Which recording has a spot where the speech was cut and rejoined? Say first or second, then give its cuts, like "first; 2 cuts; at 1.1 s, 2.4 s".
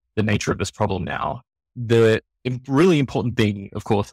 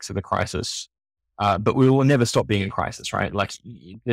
first; 1 cut; at 1.7 s